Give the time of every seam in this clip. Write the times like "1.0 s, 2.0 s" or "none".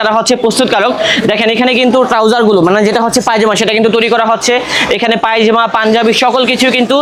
none